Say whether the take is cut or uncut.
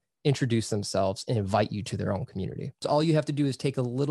cut